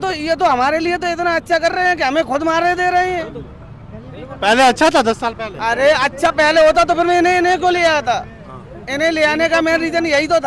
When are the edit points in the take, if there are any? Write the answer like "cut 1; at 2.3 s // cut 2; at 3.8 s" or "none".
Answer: none